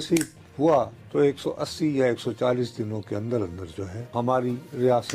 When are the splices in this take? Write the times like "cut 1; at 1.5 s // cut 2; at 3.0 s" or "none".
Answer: cut 1; at 1.0 s // cut 2; at 4.1 s